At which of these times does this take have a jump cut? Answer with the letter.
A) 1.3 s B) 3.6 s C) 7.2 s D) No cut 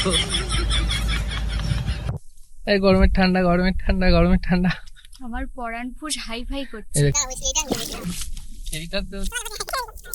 C